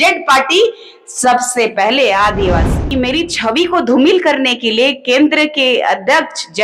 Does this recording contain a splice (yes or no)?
yes